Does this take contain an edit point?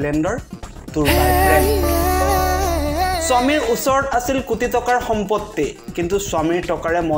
yes; 1 cut; at 1.1 s

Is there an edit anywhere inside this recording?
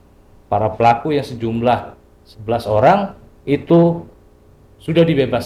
no; 0 cuts

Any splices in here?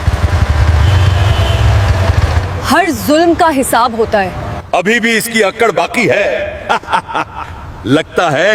no; 0 cuts

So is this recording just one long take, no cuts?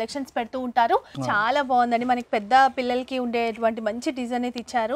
no; 1 cut; at 1.1 s

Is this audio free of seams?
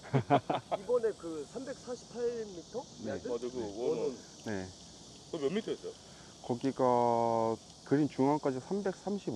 yes; 0 cuts

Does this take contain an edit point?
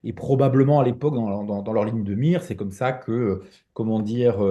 no; 0 cuts

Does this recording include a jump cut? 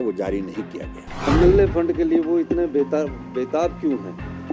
yes; 1 cut; at 1.3 s

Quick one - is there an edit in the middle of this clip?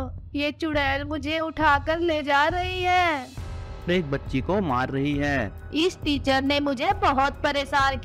yes; 2 cuts; at 3.9 s, 5.6 s

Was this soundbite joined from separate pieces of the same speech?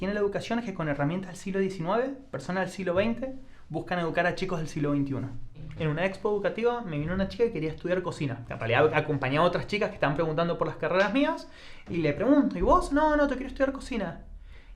yes; 1 cut; at 5.7 s

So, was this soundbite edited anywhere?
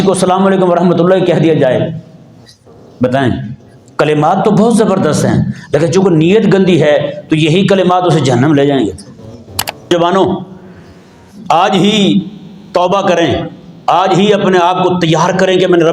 yes; 1 cut; at 9.9 s

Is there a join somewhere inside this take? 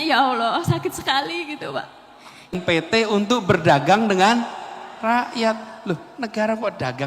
yes; 1 cut; at 2.5 s

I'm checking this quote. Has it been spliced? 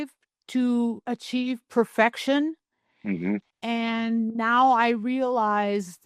yes; 1 cut; at 1.0 s

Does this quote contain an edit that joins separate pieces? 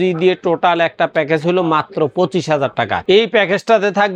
no; 0 cuts

